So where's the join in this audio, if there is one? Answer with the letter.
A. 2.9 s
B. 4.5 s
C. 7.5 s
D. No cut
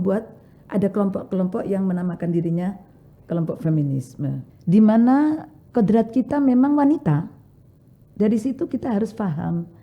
B